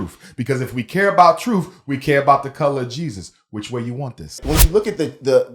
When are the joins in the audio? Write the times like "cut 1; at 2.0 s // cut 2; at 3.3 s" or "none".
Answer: cut 1; at 4.4 s